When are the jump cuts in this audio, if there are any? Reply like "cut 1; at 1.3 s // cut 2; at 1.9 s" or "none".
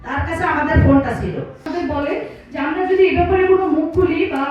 cut 1; at 1.7 s